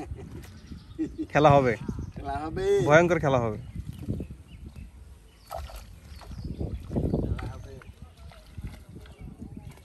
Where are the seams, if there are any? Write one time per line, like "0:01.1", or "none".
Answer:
none